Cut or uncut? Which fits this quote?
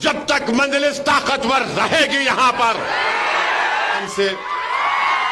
cut